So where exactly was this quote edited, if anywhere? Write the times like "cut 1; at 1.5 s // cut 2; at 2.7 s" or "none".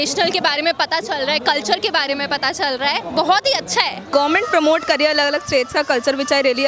cut 1; at 3.0 s // cut 2; at 4.0 s